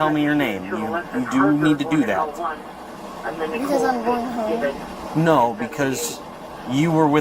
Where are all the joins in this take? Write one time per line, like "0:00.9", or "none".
none

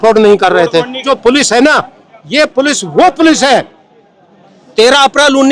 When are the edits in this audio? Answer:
0:01.0

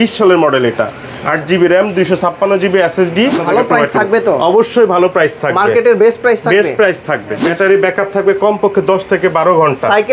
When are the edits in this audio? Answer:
0:03.4
0:07.5

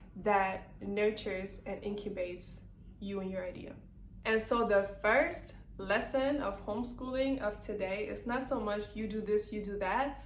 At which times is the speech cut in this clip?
none

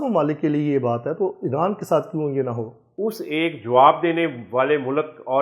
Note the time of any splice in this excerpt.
0:02.8

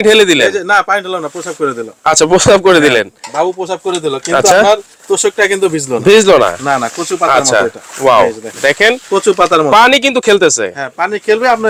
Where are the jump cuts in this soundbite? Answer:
none

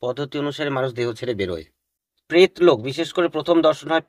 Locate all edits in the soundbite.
0:02.4

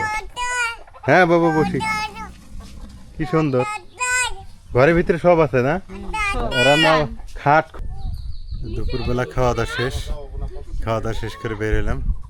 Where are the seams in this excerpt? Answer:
0:07.7

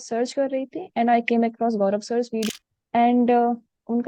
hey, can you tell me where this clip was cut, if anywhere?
0:02.5

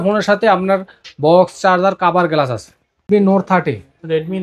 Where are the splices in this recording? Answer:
0:03.1

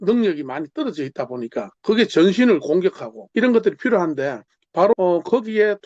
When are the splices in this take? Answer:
0:01.7
0:03.1
0:04.9

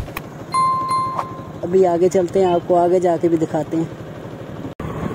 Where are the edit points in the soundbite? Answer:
none

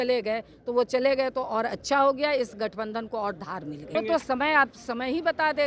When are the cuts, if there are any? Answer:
0:03.9

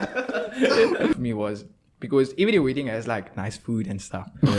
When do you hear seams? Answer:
0:01.1

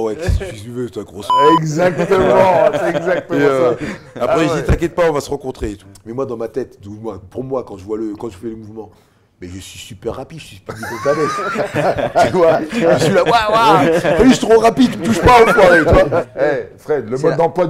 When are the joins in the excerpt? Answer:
0:05.9
0:16.3

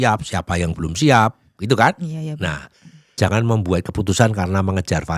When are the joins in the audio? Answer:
0:03.2

